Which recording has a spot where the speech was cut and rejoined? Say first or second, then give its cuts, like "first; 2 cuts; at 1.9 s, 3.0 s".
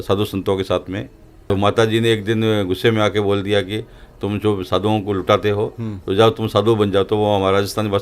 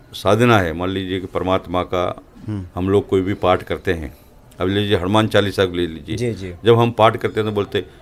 first; 1 cut; at 1.3 s